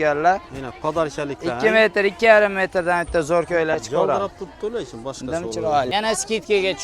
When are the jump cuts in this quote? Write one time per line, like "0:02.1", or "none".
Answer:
0:05.9